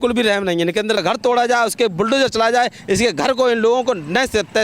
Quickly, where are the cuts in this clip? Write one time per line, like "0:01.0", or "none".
0:01.0